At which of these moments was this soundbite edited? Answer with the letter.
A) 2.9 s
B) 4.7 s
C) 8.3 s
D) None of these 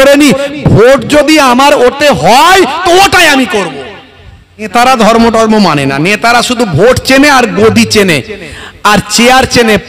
B